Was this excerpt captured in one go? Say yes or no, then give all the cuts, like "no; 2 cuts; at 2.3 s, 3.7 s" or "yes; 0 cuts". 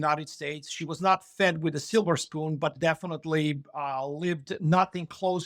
yes; 0 cuts